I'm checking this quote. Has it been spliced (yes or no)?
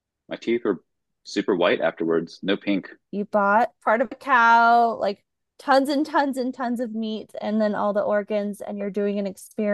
yes